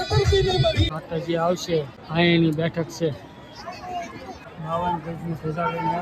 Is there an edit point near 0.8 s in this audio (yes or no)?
yes